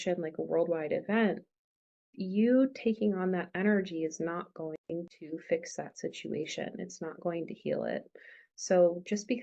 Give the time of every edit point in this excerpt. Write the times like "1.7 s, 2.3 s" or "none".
none